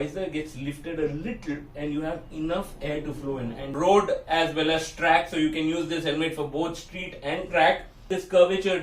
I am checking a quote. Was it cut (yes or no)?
yes